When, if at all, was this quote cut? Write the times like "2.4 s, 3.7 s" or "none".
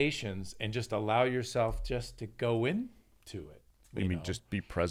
none